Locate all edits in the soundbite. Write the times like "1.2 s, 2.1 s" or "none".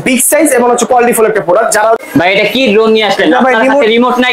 2.0 s